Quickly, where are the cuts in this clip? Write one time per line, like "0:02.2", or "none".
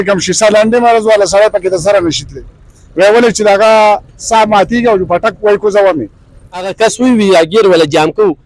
0:06.7